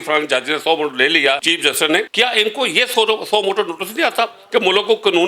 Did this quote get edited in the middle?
yes; 1 cut; at 1.7 s

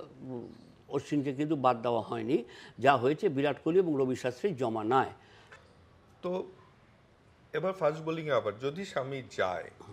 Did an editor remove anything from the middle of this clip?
no; 0 cuts

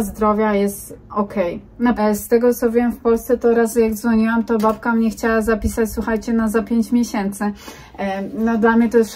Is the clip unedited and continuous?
no; 1 cut; at 2.0 s

